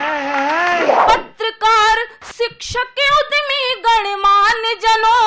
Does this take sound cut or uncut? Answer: cut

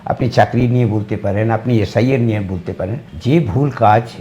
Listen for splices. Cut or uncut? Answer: cut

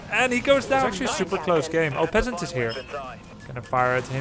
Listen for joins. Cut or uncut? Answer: cut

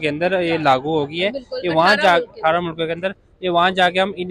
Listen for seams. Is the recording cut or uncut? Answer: uncut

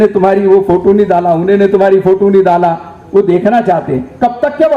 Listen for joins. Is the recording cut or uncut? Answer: uncut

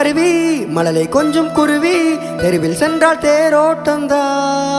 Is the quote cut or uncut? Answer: uncut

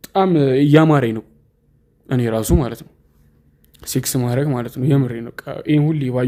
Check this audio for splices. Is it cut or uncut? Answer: uncut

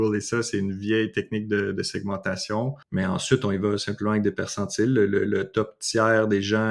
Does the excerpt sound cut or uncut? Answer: cut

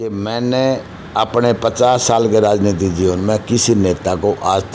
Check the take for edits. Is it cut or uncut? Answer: uncut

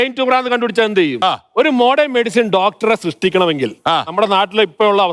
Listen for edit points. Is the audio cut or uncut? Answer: cut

